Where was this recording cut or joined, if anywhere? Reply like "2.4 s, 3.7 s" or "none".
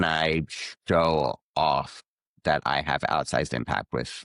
none